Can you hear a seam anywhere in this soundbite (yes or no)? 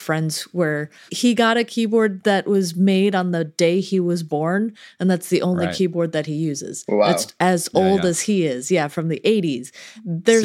yes